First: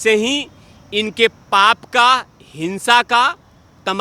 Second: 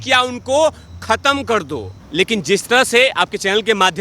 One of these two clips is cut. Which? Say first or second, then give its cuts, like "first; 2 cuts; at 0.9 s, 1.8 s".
second; 1 cut; at 2.0 s